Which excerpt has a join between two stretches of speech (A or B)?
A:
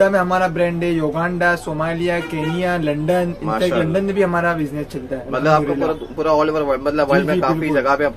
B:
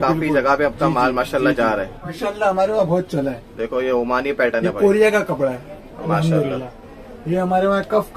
B